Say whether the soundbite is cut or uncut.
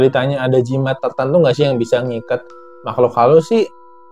uncut